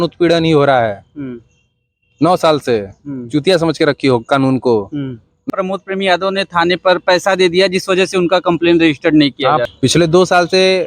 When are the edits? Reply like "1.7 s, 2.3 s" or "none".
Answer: 5.4 s, 9.6 s